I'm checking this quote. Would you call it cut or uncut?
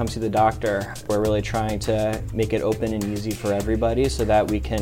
cut